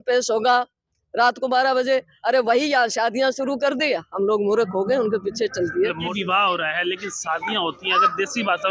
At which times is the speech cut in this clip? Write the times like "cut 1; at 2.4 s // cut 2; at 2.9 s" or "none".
cut 1; at 6.1 s